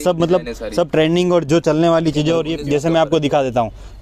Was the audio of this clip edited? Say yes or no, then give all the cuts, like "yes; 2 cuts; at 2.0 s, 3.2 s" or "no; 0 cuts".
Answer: yes; 1 cut; at 2.5 s